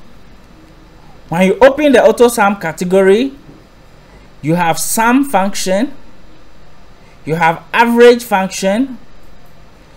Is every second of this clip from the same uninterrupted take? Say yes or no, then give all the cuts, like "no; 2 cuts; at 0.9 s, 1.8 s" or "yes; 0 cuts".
yes; 0 cuts